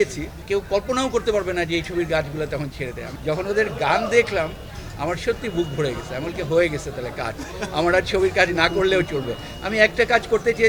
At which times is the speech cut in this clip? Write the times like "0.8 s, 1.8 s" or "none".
none